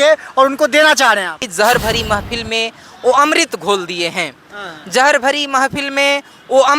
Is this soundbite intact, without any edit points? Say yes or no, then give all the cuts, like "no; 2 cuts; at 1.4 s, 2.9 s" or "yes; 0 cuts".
no; 1 cut; at 1.5 s